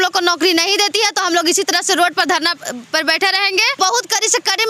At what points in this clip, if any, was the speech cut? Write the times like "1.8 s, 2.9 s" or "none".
3.8 s